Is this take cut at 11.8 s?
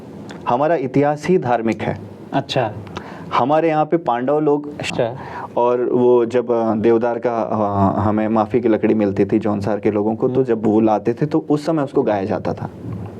no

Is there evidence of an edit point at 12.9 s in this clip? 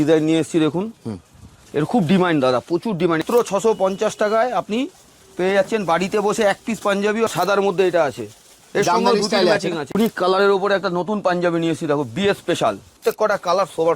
yes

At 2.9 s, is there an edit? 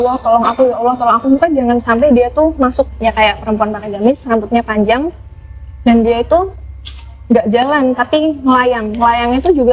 yes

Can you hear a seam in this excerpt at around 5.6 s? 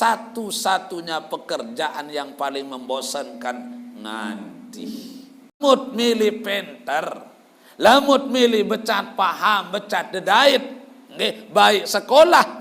yes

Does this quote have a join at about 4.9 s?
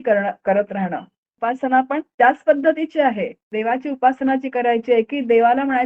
no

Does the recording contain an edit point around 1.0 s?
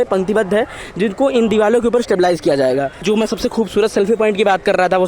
no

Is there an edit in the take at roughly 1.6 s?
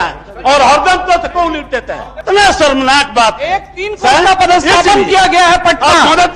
yes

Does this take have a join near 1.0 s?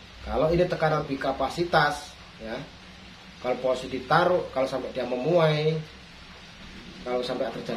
yes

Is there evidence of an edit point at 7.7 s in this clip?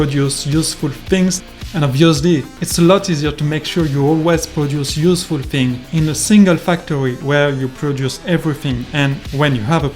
no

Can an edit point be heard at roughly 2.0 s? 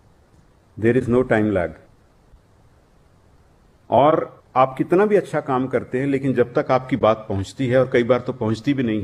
no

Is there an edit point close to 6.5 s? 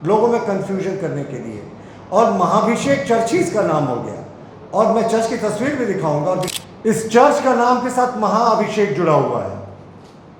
yes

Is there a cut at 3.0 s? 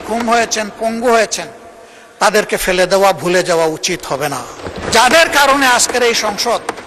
no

